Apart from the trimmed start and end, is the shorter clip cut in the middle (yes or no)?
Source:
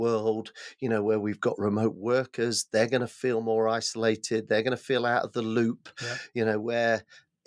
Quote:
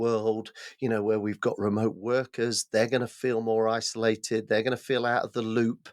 no